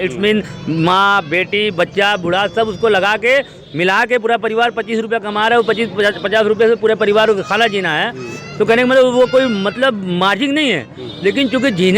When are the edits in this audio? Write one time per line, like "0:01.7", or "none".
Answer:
none